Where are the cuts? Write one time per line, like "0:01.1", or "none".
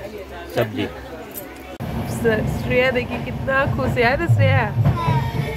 0:01.8